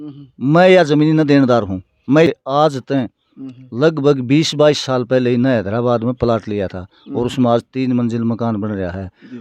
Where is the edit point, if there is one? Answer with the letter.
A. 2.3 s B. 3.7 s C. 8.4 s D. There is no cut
A